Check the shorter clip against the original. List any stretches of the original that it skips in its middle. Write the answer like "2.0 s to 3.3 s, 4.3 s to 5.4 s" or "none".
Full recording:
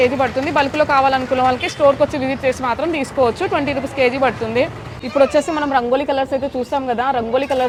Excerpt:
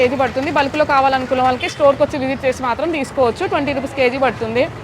none